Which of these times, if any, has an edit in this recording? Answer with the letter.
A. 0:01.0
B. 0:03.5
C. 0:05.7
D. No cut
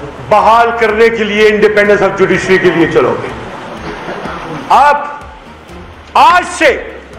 D